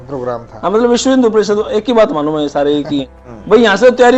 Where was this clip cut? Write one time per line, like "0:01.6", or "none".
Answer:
0:03.3